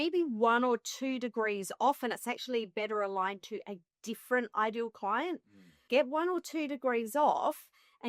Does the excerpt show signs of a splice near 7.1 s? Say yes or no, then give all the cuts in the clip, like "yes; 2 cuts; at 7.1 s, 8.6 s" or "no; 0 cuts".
no; 1 cut; at 5.8 s